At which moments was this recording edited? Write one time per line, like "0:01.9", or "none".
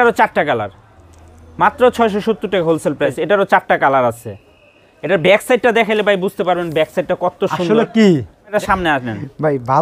0:03.1
0:08.5